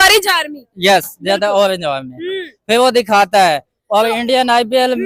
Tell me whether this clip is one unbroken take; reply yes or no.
yes